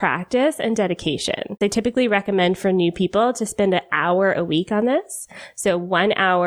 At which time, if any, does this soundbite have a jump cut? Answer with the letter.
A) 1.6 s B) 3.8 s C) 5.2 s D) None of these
A